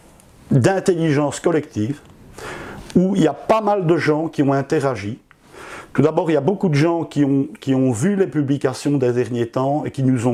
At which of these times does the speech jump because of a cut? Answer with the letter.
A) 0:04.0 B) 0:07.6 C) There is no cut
C